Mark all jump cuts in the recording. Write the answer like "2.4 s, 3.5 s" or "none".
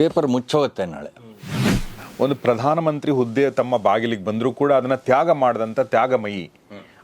1.8 s